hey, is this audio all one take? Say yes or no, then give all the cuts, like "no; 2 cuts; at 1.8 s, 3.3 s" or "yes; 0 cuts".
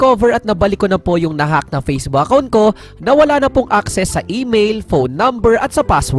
yes; 0 cuts